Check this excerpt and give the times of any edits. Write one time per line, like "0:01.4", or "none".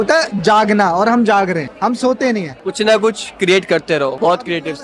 none